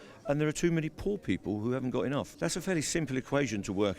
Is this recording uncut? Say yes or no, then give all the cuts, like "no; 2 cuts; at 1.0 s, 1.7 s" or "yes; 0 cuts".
no; 1 cut; at 2.3 s